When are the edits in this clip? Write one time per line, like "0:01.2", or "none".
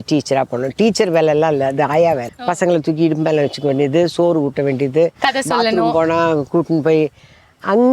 0:02.3